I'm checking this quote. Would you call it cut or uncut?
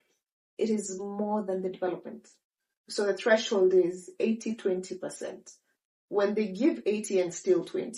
uncut